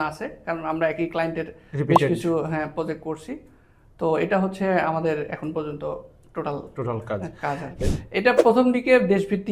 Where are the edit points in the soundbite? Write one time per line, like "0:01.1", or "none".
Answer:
0:07.8